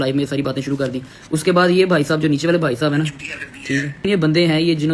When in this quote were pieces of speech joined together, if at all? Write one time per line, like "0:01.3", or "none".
0:04.0